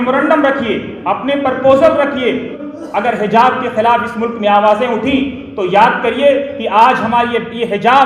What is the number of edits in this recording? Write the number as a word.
one